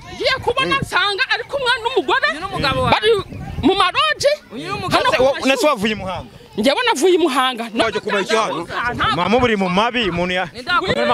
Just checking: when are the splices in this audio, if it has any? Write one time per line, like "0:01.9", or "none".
0:07.8